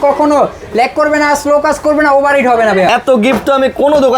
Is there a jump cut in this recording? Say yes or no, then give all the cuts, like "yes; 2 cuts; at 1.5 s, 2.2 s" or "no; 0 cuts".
yes; 1 cut; at 2.9 s